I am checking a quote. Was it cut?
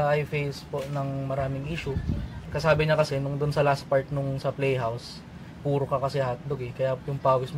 yes; 1 cut; at 2.4 s

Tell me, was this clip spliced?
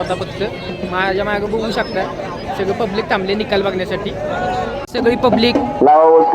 yes; 1 cut; at 4.8 s

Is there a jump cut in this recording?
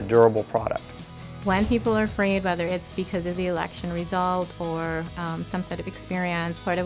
yes; 1 cut; at 1.1 s

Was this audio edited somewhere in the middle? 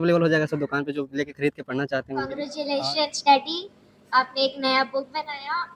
yes; 1 cut; at 2.5 s

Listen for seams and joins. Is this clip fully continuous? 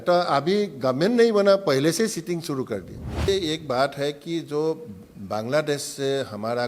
no; 1 cut; at 3.3 s

